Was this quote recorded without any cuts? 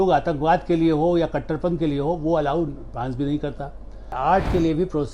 no; 1 cut; at 4.1 s

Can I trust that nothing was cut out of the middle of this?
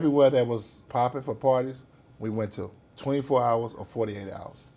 no; 2 cuts; at 0.9 s, 2.8 s

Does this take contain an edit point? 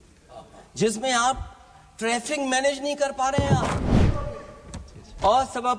yes; 1 cut; at 4.0 s

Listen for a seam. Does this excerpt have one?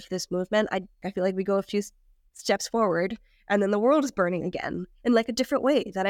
yes; 1 cut; at 1.0 s

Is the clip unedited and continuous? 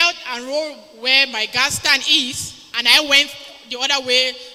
yes; 0 cuts

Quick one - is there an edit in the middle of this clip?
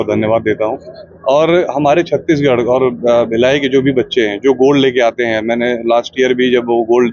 no; 0 cuts

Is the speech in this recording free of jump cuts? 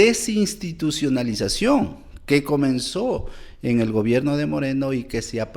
yes; 0 cuts

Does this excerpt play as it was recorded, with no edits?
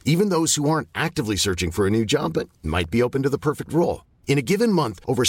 yes; 0 cuts

